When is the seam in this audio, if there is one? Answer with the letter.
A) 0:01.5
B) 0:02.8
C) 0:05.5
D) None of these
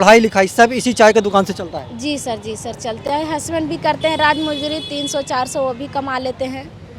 D